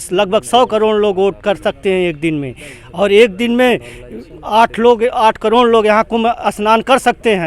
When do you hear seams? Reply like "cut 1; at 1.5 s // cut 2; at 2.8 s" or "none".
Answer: none